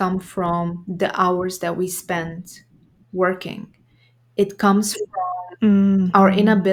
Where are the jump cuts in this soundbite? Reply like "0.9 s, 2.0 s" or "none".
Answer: none